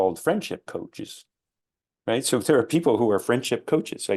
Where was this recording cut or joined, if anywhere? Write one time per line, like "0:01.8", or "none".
none